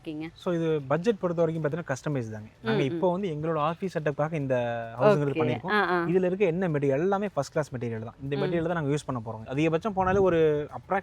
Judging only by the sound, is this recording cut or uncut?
cut